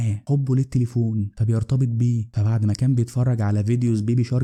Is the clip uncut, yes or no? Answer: yes